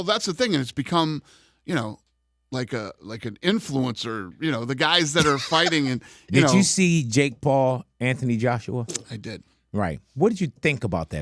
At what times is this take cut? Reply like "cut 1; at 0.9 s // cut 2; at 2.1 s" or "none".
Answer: cut 1; at 6.5 s